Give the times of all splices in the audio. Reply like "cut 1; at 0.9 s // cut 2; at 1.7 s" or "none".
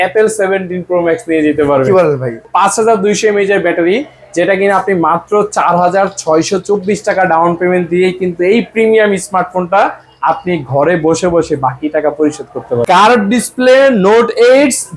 cut 1; at 2.4 s // cut 2; at 12.8 s